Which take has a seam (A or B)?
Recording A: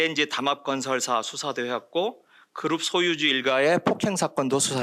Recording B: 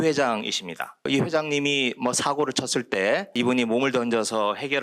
B